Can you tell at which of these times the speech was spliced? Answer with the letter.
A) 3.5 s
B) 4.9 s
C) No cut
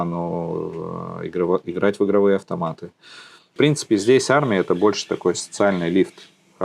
A